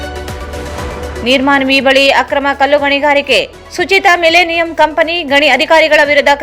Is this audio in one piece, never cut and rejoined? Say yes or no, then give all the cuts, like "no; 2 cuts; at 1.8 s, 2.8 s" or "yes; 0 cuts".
no; 1 cut; at 1.1 s